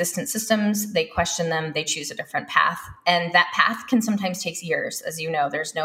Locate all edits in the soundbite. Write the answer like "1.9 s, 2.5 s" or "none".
none